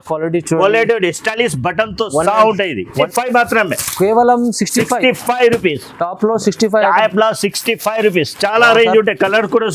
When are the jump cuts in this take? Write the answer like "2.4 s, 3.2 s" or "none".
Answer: 3.0 s